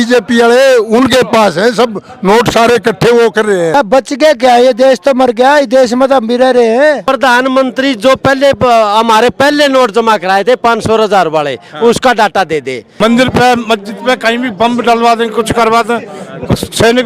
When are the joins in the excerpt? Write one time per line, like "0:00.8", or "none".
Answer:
0:03.7
0:07.0
0:12.8